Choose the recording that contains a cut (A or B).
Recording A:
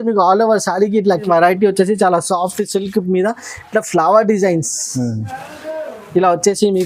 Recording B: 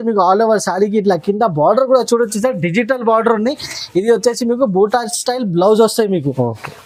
A